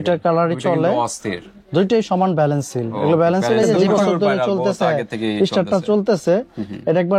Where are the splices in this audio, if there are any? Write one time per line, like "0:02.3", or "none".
0:03.8